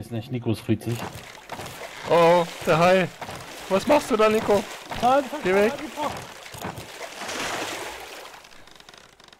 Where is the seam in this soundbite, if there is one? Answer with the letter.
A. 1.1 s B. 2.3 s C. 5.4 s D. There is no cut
A